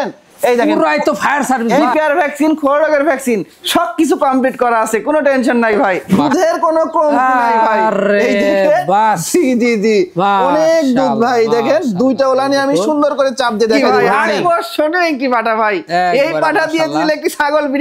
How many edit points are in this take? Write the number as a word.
three